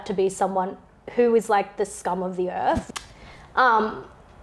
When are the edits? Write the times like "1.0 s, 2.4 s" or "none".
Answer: 2.9 s

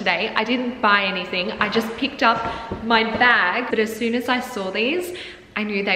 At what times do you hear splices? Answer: 3.7 s

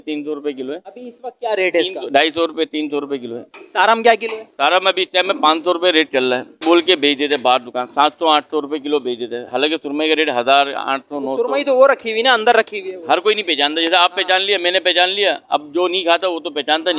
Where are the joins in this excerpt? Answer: none

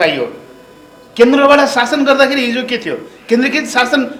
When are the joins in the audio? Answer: none

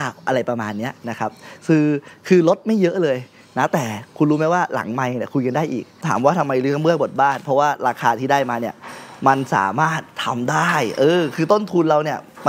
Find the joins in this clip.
6.0 s

